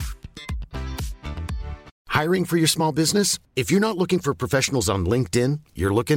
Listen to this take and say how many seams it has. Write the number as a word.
one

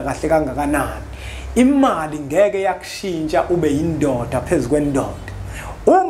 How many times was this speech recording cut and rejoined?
zero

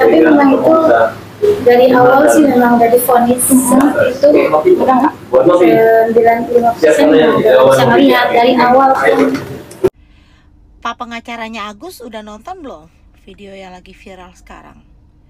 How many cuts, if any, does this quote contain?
one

